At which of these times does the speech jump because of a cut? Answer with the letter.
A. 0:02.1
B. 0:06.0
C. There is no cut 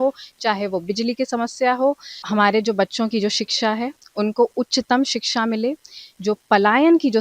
A